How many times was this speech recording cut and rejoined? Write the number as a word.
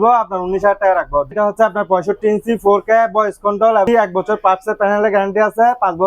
two